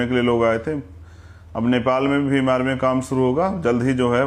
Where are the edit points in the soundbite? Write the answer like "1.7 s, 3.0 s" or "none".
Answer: none